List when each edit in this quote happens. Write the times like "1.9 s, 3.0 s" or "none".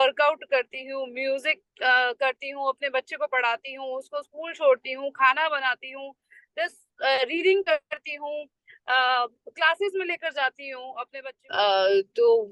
11.0 s